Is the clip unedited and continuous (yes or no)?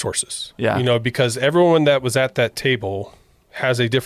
yes